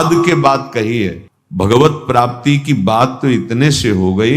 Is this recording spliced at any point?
no; 0 cuts

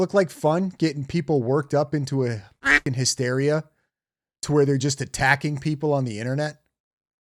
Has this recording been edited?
no; 0 cuts

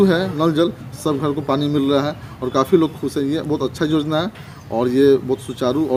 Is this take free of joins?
yes; 0 cuts

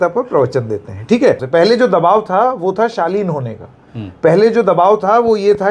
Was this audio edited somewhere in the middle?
yes; 1 cut; at 1.4 s

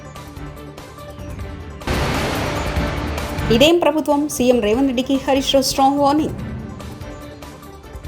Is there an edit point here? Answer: yes; 1 cut; at 1.8 s

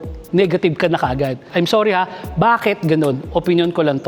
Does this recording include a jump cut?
yes; 1 cut; at 1.5 s

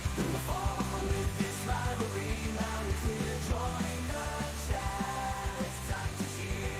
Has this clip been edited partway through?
no; 0 cuts

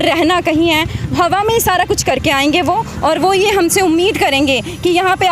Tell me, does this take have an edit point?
no; 0 cuts

